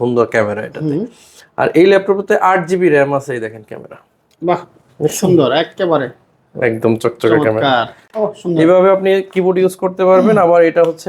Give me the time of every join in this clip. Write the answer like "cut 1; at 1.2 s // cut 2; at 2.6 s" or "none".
cut 1; at 8.0 s